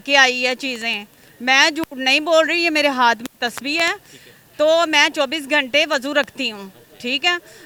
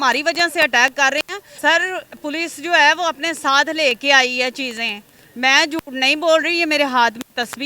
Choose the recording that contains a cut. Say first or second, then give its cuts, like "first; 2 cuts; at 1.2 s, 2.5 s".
second; 1 cut; at 1.4 s